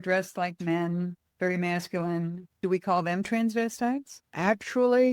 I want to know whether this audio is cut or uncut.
cut